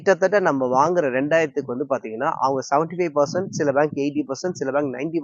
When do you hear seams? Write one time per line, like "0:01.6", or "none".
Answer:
none

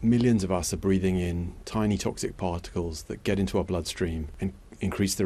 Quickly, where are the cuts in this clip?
0:04.3

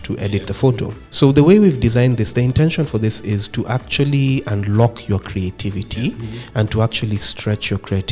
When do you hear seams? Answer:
none

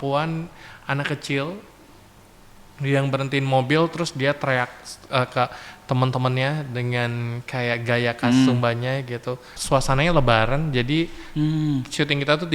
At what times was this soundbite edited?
0:09.5

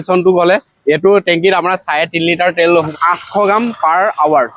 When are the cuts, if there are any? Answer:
0:02.9

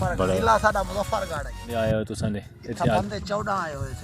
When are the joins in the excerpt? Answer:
0:01.7

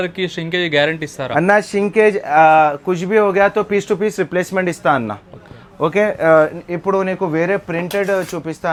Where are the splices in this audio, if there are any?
none

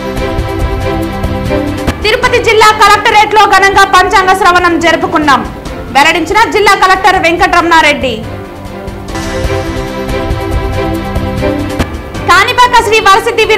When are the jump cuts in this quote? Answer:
0:02.0

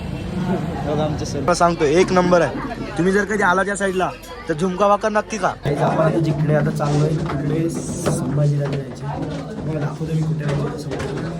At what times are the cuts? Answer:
0:01.5
0:05.6

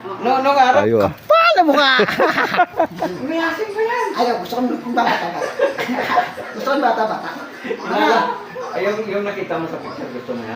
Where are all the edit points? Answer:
0:00.8
0:03.1

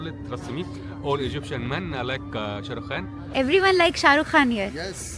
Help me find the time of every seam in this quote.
0:03.2

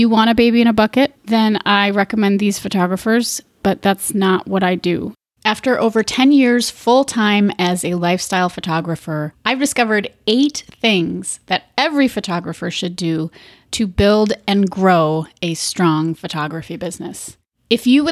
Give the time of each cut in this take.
0:01.2
0:05.1

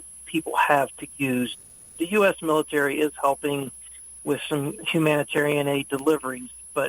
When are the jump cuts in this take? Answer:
0:01.5
0:04.8

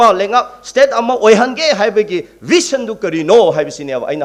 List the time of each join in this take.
none

